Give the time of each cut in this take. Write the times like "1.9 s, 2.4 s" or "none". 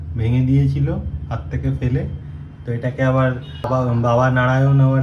3.7 s